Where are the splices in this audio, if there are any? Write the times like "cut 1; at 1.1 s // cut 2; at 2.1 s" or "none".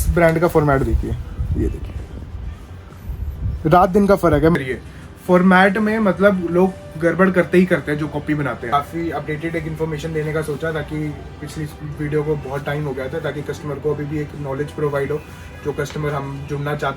cut 1; at 4.5 s // cut 2; at 8.6 s